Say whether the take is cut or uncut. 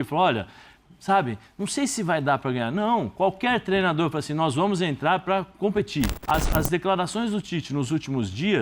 cut